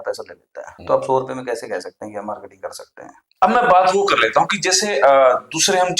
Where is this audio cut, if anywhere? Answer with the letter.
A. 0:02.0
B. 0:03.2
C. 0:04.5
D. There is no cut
B